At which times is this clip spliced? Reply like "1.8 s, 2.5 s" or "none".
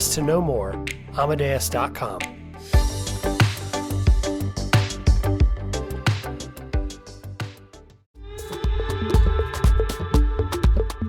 7.9 s, 10.2 s